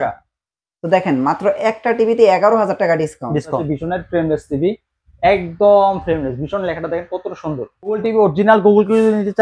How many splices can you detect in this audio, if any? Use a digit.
2